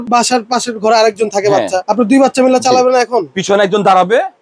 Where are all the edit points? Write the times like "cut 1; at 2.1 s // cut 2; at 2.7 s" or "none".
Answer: none